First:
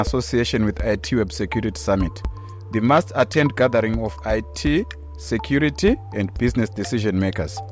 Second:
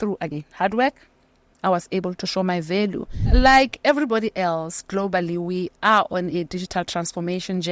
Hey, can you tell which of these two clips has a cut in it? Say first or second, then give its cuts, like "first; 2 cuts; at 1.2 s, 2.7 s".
second; 1 cut; at 3.2 s